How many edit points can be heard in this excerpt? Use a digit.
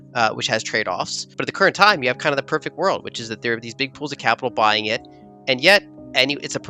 1